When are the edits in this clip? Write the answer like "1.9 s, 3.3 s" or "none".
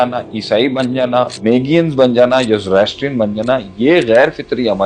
1.3 s